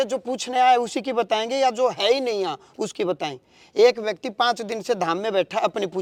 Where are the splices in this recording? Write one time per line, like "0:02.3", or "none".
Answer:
none